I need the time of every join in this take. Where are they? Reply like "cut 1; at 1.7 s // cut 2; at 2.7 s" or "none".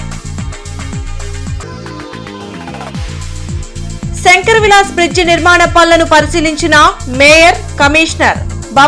cut 1; at 4.0 s